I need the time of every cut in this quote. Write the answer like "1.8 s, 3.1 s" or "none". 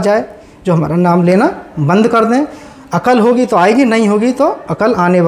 none

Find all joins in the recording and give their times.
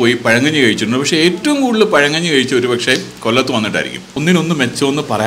4.1 s

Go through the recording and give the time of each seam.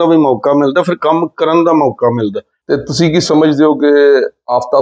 2.5 s

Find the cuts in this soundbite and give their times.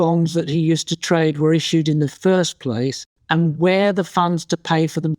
3.1 s

